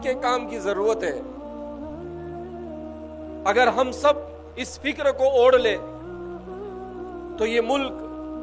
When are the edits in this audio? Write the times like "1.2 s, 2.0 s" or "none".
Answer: 1.2 s, 3.4 s